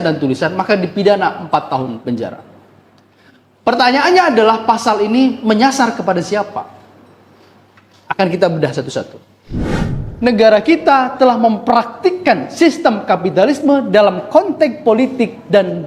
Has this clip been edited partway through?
yes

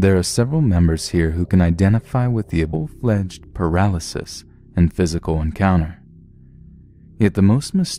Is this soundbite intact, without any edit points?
yes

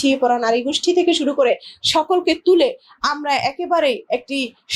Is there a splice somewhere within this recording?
no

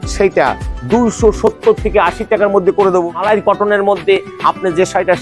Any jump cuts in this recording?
yes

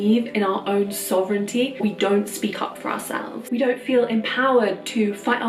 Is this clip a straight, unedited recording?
no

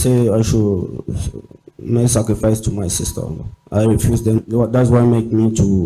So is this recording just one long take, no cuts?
yes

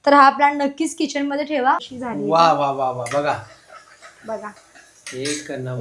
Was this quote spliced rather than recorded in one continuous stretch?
yes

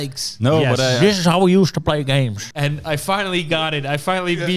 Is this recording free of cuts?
no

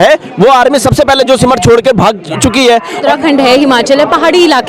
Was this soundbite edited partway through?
yes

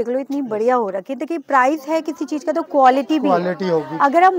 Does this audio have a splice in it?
no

